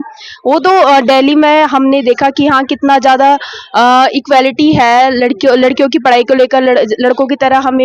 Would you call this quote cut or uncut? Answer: uncut